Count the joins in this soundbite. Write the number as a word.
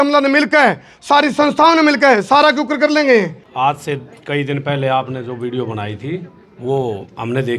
one